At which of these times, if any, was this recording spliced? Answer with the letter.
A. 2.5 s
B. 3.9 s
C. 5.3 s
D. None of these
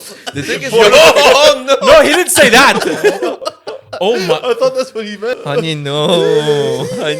C